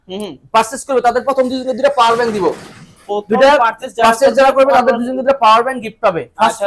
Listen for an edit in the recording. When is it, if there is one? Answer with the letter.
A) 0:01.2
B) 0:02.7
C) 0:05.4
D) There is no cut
D